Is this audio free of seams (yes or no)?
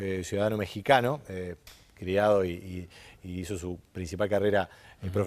no